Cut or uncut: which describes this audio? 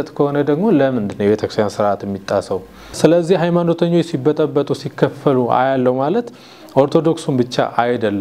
cut